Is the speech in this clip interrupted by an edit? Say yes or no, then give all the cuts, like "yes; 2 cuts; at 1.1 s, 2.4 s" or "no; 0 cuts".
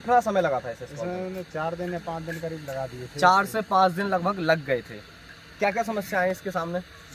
no; 0 cuts